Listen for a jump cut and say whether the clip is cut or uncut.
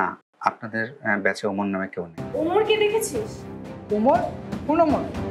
cut